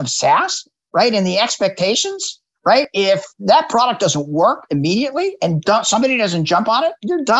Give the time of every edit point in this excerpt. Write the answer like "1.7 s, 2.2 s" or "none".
2.9 s